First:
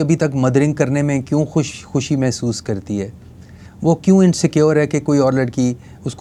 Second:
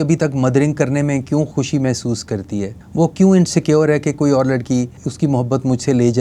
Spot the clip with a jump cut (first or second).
second